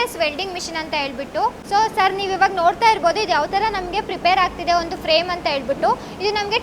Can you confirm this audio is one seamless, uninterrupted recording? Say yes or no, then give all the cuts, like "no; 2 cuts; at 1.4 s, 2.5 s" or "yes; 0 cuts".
yes; 0 cuts